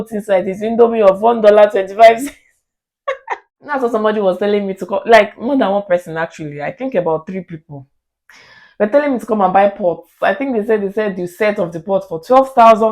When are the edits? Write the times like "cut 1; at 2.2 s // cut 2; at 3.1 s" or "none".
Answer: cut 1; at 3.2 s